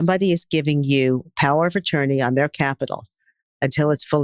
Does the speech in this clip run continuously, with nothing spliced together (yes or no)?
yes